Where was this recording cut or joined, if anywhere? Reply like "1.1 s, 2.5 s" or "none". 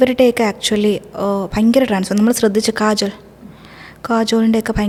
none